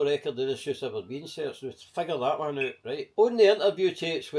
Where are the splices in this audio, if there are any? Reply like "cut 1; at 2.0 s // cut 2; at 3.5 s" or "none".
cut 1; at 3.1 s

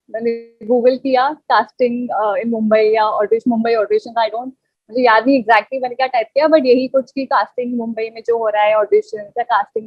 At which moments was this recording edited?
none

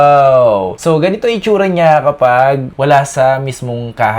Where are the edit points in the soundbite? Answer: cut 1; at 2.7 s

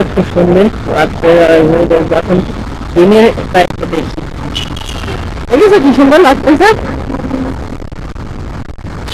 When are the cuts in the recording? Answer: none

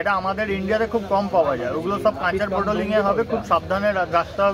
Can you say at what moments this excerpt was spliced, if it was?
none

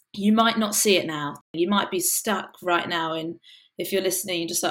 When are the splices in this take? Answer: cut 1; at 1.5 s

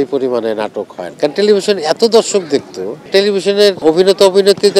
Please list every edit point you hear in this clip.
cut 1; at 1.0 s // cut 2; at 3.8 s

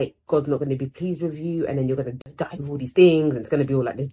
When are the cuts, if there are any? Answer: cut 1; at 2.3 s

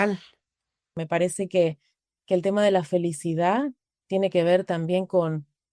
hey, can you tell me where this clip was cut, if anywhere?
cut 1; at 0.9 s

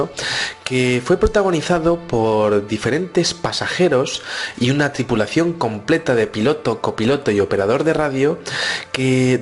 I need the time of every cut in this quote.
cut 1; at 6.0 s

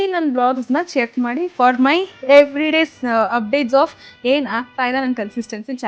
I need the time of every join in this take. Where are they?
none

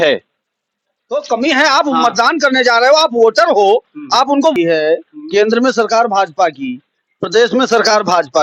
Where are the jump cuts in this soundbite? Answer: cut 1; at 4.5 s

